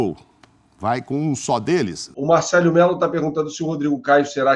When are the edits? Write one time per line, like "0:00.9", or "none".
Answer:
0:02.1